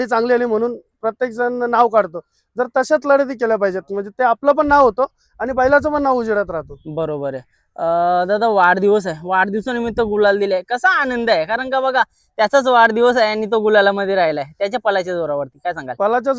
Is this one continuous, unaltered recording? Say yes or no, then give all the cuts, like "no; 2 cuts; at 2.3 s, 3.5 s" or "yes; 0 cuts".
yes; 0 cuts